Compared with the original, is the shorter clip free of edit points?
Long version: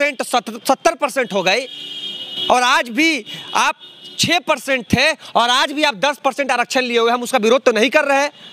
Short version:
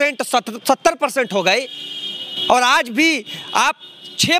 yes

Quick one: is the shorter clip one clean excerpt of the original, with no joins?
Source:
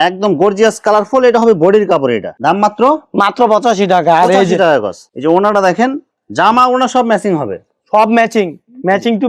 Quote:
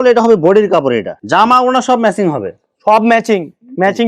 no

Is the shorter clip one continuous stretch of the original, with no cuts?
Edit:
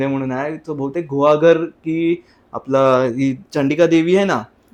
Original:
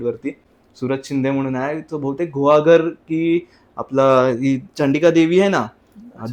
yes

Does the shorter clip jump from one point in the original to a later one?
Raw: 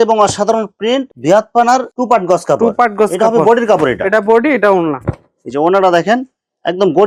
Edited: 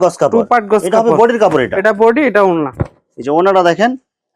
no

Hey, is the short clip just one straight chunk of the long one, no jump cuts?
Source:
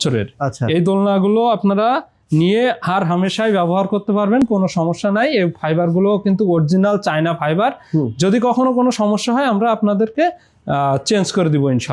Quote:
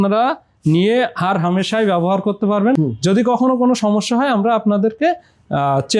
no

